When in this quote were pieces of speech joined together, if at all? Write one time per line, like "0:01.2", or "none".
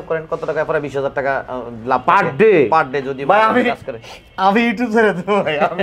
none